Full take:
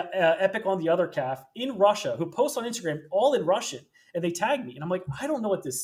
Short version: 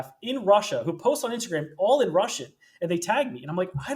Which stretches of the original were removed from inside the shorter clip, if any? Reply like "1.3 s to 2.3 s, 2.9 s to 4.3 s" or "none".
none